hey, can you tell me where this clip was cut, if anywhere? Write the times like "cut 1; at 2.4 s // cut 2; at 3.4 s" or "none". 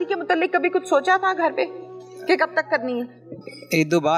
none